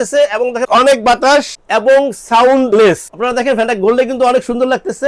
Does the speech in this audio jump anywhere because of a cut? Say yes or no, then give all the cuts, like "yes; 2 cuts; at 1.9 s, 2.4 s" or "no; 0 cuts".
no; 0 cuts